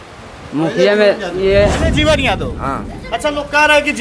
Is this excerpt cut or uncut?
cut